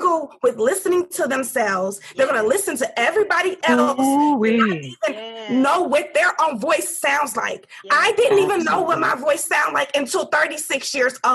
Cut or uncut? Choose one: uncut